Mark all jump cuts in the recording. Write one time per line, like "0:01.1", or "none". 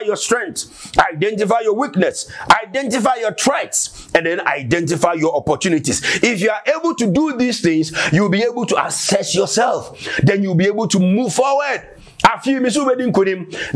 none